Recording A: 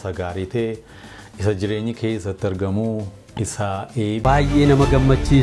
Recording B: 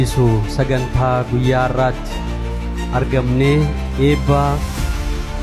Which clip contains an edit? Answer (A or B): A